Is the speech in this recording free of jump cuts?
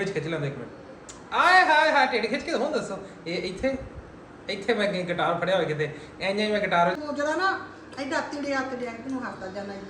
no; 1 cut; at 6.9 s

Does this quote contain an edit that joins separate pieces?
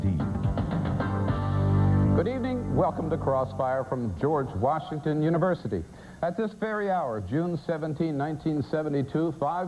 no; 0 cuts

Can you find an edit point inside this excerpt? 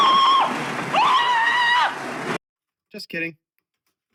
no; 0 cuts

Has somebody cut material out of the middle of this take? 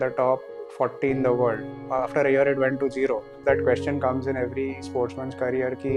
yes; 2 cuts; at 1.8 s, 3.4 s

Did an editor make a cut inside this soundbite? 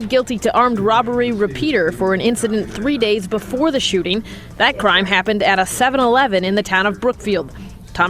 no; 0 cuts

